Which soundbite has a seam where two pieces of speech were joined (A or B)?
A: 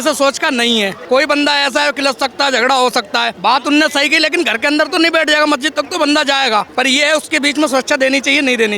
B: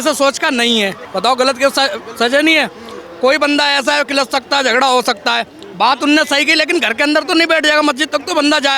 A